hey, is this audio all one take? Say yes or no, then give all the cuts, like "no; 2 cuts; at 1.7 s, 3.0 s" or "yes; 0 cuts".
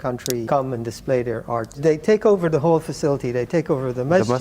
no; 1 cut; at 1.7 s